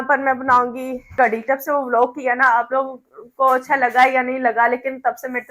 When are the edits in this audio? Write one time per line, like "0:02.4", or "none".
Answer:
0:01.4